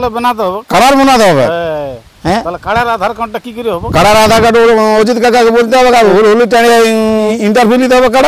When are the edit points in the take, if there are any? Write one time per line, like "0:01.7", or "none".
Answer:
0:06.1
0:07.3